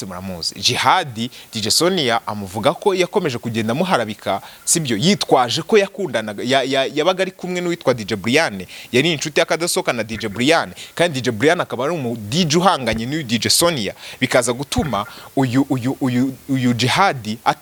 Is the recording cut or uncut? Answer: uncut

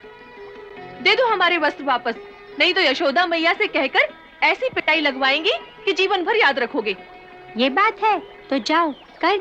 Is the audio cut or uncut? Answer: uncut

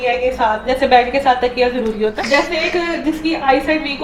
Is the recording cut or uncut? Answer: cut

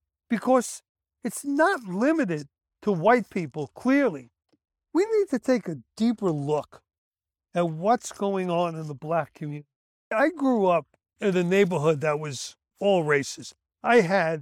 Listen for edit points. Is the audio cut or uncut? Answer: cut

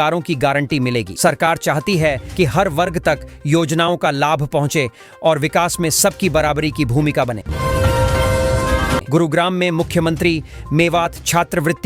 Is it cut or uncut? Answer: cut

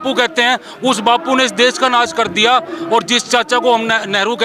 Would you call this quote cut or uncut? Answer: uncut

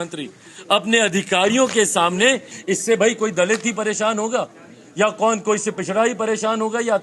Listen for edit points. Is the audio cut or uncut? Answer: cut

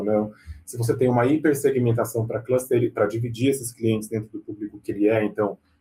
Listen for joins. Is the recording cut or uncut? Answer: uncut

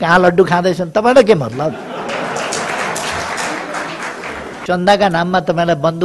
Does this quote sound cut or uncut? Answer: cut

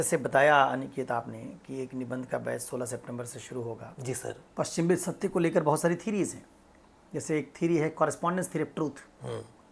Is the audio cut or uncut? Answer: cut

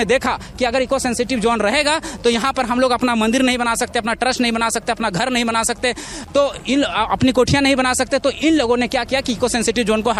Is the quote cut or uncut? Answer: uncut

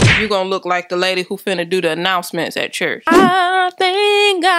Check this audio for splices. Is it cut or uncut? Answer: cut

